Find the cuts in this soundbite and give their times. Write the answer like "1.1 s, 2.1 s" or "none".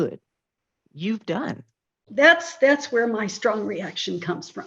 2.0 s